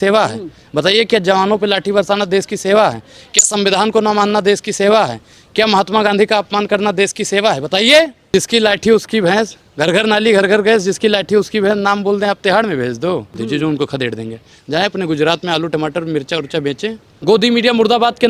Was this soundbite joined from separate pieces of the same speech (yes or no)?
yes